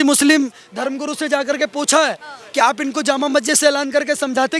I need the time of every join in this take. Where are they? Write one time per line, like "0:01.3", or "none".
none